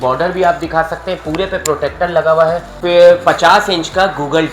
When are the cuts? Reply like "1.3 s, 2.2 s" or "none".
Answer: 2.7 s